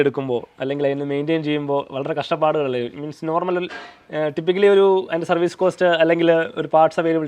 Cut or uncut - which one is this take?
uncut